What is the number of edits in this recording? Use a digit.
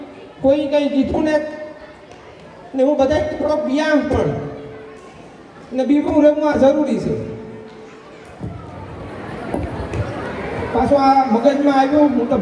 1